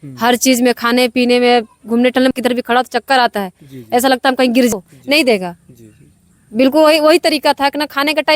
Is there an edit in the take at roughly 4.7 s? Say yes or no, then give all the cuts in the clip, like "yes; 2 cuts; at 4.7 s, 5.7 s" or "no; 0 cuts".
yes; 2 cuts; at 2.3 s, 4.7 s